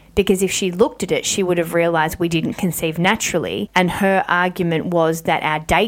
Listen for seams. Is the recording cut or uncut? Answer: cut